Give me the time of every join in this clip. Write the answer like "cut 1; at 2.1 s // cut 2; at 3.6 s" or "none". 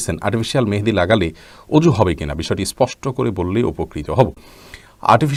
none